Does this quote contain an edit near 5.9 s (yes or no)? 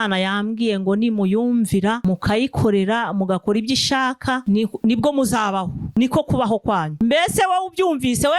no